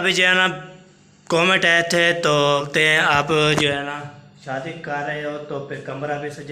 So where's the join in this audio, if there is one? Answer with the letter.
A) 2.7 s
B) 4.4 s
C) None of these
A